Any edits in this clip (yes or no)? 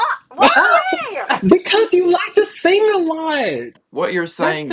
yes